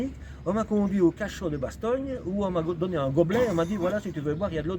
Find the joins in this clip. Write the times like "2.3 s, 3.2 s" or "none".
none